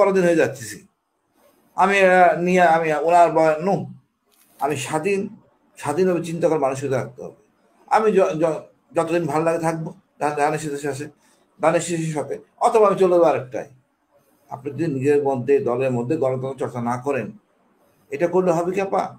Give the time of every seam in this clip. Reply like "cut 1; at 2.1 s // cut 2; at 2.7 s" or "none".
none